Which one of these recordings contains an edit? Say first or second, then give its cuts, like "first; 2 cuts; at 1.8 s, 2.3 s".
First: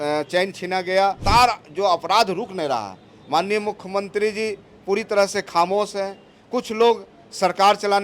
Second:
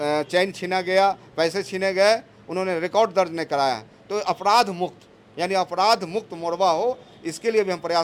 first; 1 cut; at 1.2 s